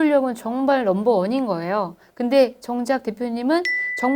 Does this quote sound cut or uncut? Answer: uncut